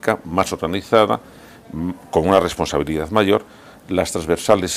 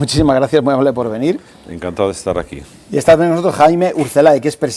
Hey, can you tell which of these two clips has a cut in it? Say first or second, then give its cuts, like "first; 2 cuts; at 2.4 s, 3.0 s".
second; 1 cut; at 1.2 s